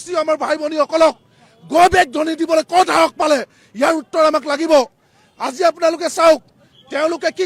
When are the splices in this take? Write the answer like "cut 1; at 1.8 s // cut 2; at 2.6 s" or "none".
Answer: none